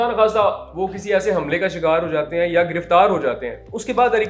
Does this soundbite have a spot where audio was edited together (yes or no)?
no